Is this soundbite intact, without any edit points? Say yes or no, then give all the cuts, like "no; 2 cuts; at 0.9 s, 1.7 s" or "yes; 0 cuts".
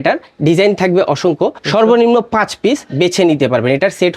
no; 1 cut; at 1.6 s